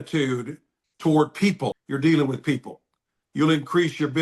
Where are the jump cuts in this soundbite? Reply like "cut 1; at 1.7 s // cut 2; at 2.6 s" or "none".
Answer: cut 1; at 1.8 s